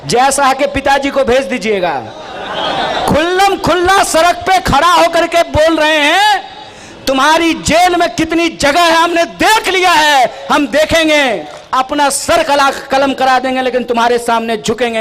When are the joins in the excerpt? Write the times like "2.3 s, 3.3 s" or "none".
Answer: 11.6 s